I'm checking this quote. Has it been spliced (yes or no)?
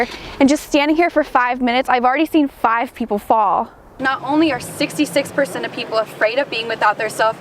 yes